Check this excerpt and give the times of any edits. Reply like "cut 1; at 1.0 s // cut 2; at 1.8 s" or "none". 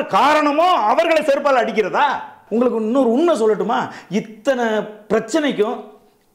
cut 1; at 2.4 s

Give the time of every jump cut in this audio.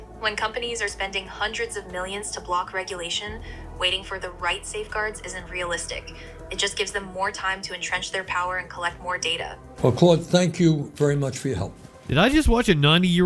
cut 1; at 9.7 s

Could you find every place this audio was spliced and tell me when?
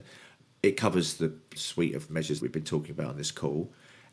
cut 1; at 1.6 s // cut 2; at 2.4 s

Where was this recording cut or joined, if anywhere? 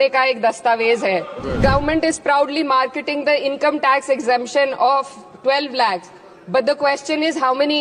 cut 1; at 1.6 s

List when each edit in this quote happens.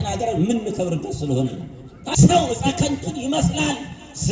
cut 1; at 2.0 s

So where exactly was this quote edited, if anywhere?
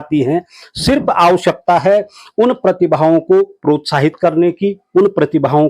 none

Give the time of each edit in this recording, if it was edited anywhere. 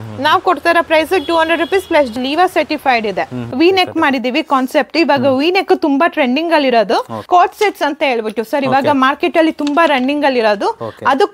cut 1; at 2.2 s // cut 2; at 3.4 s // cut 3; at 7.2 s

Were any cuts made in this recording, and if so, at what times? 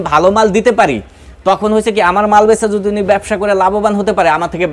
none

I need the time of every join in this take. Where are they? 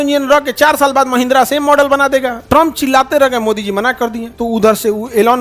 cut 1; at 2.4 s // cut 2; at 4.3 s

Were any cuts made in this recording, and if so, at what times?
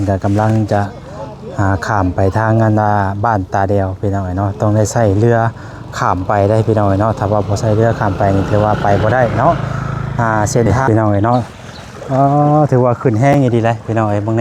cut 1; at 10.8 s

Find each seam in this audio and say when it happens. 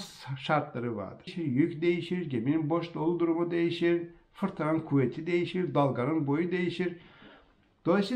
cut 1; at 1.3 s

